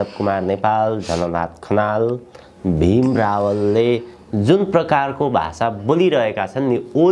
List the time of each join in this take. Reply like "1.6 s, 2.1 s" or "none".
none